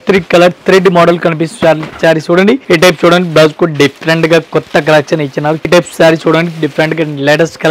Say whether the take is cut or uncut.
cut